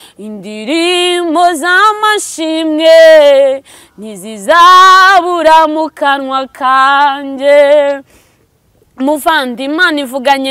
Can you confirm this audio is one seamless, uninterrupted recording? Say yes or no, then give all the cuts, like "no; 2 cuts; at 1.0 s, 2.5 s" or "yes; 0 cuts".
yes; 0 cuts